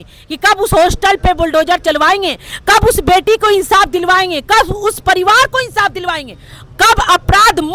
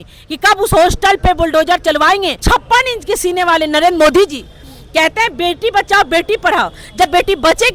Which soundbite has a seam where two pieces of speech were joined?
second; 1 cut; at 2.4 s

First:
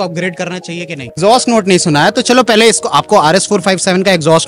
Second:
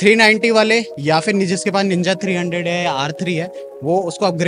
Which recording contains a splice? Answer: first; 1 cut; at 1.2 s

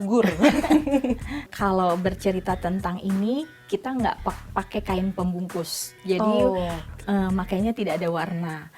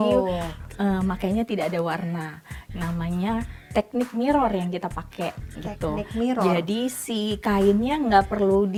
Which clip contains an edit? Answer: first; 1 cut; at 1.5 s

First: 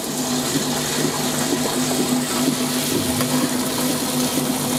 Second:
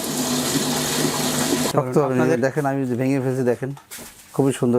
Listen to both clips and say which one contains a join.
second; 1 cut; at 1.7 s

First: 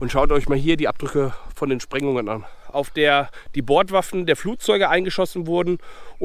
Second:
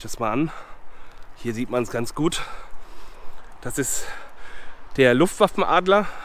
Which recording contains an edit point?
first; 1 cut; at 2.5 s

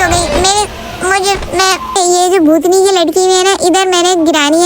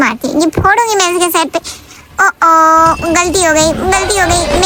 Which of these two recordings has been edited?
first; 1 cut; at 2.0 s

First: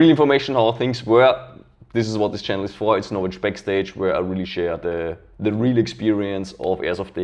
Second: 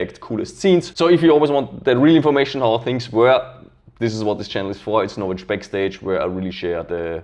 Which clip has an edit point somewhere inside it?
second; 1 cut; at 0.9 s

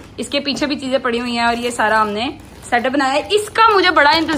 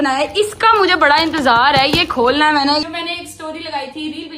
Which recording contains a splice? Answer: second; 1 cut; at 2.8 s

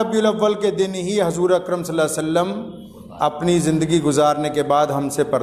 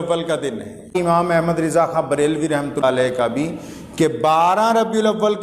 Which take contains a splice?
second; 2 cuts; at 0.9 s, 2.8 s

